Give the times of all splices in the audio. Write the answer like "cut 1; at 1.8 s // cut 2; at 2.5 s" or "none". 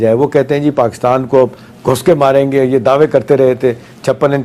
none